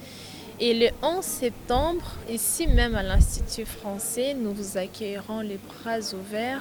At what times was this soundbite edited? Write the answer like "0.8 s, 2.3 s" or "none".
none

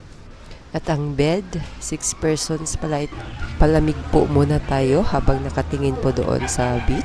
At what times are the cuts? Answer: 3.1 s

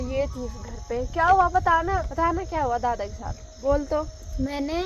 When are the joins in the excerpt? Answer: none

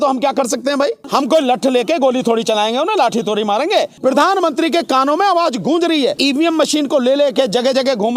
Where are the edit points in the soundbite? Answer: 1.0 s, 3.9 s, 6.2 s

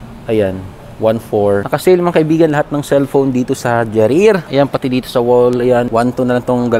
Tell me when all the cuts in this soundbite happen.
1.7 s, 4.4 s, 5.9 s

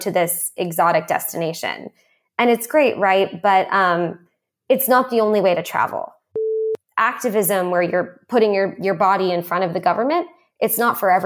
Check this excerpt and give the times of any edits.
6.5 s

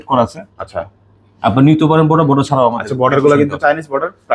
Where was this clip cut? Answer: none

